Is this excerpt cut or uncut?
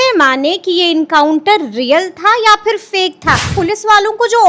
cut